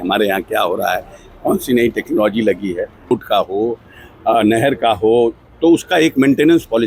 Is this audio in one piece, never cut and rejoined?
no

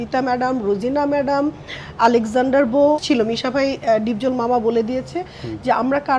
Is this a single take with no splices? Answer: no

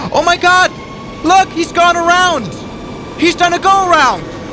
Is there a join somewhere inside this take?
no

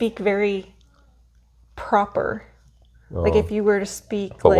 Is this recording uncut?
yes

